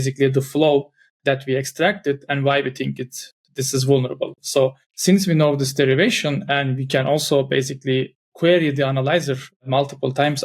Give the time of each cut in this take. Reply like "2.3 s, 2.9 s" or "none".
4.8 s